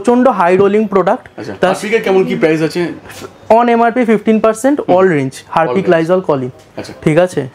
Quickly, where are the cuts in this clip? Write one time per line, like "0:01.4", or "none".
none

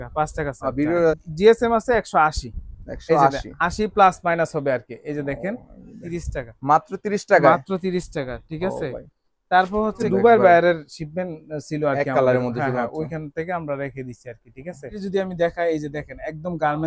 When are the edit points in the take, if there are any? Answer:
0:01.2
0:06.0
0:10.0
0:15.0

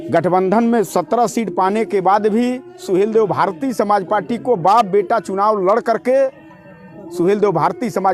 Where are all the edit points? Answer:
none

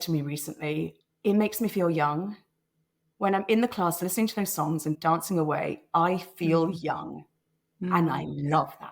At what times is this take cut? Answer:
0:01.0
0:05.0

